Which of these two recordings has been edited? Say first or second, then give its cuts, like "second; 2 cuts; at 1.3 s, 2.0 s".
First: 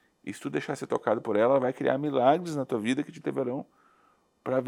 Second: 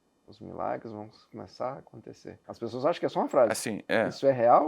second; 1 cut; at 2.4 s